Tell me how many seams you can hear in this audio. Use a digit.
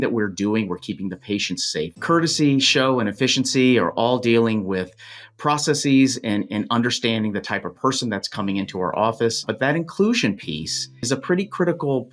3